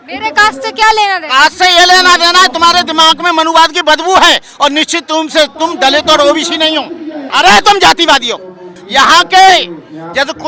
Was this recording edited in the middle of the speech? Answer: yes; 2 cuts; at 7.3 s, 8.8 s

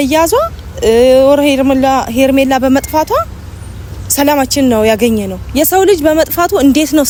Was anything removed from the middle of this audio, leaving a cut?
no; 0 cuts

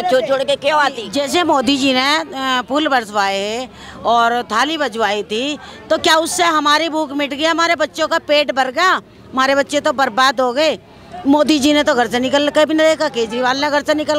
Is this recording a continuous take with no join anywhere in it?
no; 1 cut; at 1.0 s

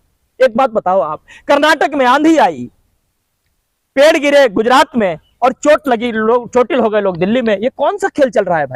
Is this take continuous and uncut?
yes; 0 cuts

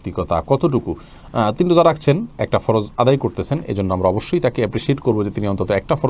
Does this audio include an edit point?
no; 0 cuts

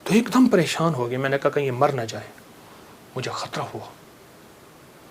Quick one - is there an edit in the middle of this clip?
no; 0 cuts

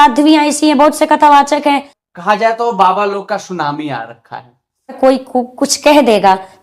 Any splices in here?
yes; 2 cuts; at 1.9 s, 5.0 s

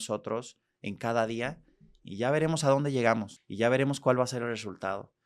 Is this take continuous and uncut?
no; 1 cut; at 3.4 s

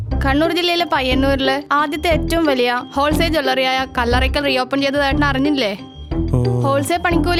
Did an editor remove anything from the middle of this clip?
no; 0 cuts

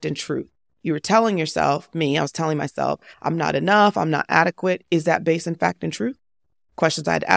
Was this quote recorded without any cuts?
yes; 0 cuts

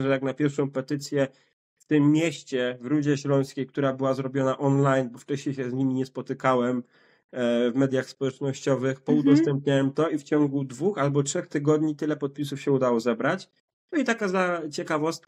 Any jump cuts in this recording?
no; 0 cuts

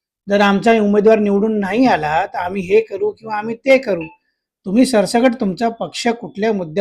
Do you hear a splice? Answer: no; 0 cuts

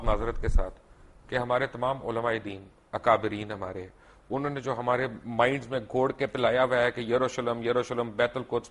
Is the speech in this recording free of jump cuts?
yes; 0 cuts

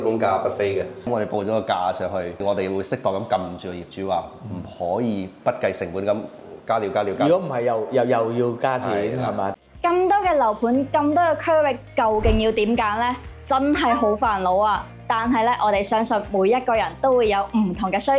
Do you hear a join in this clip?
yes; 3 cuts; at 1.1 s, 2.4 s, 9.5 s

